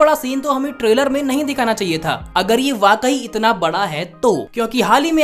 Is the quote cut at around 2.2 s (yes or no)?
yes